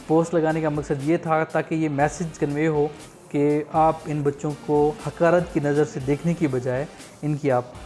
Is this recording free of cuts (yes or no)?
yes